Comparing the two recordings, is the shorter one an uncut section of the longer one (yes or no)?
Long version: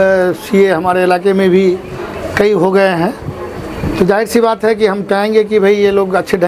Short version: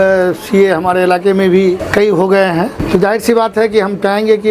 no